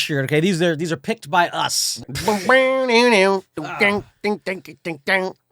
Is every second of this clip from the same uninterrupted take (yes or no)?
no